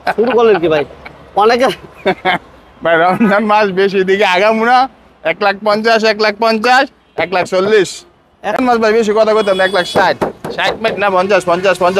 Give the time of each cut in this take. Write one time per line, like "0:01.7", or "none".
0:08.6